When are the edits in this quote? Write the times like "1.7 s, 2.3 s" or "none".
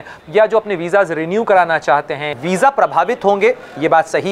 2.3 s